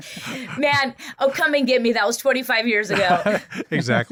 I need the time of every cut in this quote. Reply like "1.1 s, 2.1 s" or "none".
none

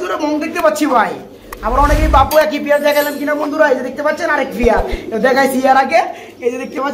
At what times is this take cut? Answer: none

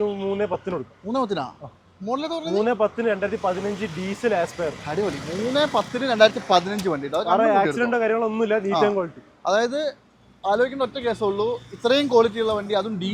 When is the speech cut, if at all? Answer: none

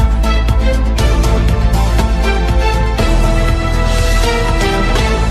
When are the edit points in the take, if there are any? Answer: none

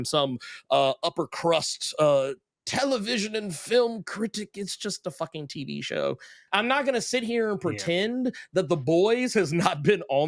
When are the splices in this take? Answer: 6.4 s

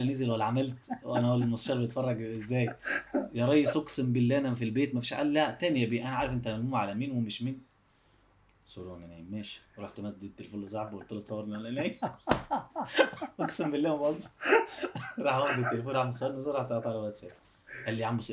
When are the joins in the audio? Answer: 8.5 s

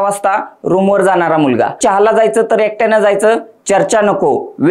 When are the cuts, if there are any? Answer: 1.8 s

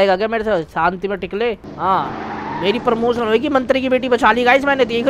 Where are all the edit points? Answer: 1.7 s

